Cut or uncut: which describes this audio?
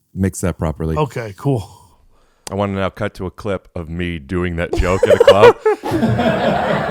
uncut